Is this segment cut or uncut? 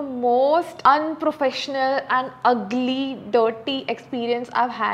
uncut